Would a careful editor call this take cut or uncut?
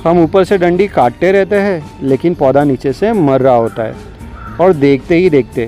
uncut